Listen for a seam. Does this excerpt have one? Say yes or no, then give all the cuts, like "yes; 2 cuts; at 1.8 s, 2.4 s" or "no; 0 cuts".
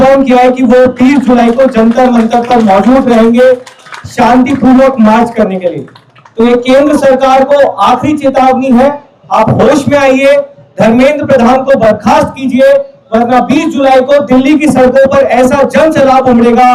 no; 0 cuts